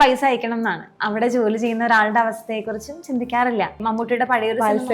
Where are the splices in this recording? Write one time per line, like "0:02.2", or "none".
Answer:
0:00.9
0:03.8